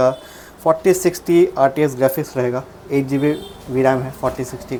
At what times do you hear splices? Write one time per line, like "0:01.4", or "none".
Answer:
none